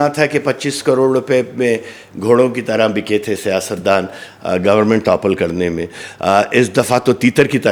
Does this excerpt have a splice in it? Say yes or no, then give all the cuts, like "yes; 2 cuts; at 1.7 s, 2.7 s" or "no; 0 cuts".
no; 0 cuts